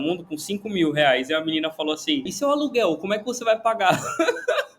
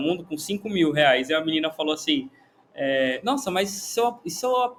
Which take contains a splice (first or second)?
first